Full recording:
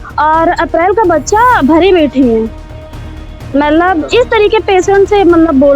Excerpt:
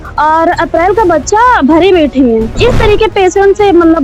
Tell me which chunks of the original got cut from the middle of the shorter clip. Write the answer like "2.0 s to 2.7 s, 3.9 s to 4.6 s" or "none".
2.5 s to 4.1 s